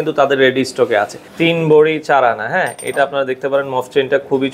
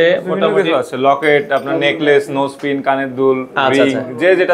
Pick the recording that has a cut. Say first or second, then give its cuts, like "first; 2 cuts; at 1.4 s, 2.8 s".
first; 1 cut; at 1.2 s